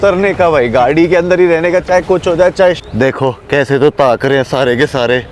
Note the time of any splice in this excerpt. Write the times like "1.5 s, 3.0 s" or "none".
2.8 s